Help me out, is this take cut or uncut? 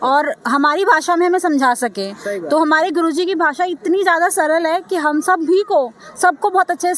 uncut